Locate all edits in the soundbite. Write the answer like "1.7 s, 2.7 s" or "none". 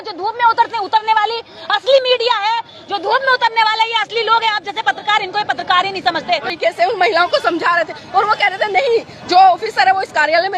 6.5 s